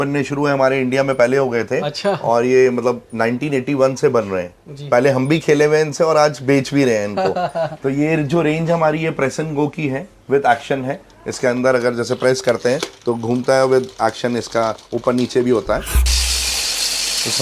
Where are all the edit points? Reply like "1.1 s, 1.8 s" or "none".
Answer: 16.1 s